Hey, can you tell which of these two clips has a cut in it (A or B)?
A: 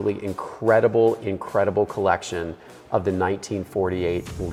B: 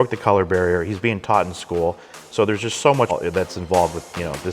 B